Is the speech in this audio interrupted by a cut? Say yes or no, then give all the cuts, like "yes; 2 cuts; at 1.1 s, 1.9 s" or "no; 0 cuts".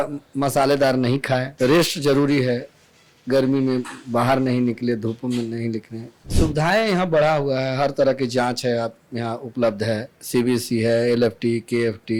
yes; 3 cuts; at 1.5 s, 6.3 s, 10.1 s